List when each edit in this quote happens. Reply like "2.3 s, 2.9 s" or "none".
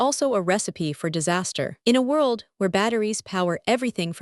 1.8 s